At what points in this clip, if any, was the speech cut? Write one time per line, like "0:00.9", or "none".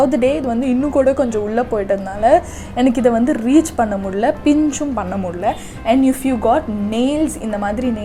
none